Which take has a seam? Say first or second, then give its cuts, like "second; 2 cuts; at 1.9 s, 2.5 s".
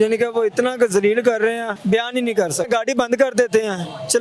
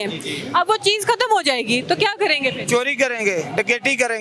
first; 2 cuts; at 1.7 s, 2.7 s